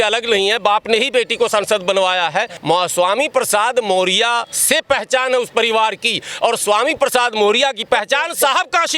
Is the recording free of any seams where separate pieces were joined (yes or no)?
no